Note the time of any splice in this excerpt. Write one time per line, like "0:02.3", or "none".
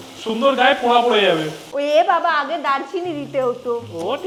none